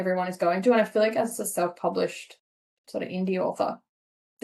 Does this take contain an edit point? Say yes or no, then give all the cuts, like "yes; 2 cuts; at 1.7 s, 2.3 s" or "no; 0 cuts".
no; 0 cuts